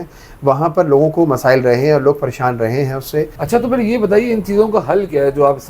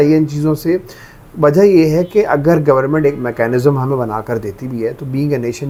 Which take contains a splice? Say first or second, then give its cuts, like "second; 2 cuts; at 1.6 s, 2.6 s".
first; 1 cut; at 3.4 s